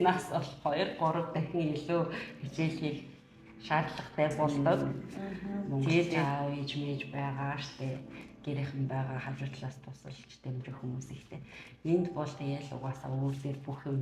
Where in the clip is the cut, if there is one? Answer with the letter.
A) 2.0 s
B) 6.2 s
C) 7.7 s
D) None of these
B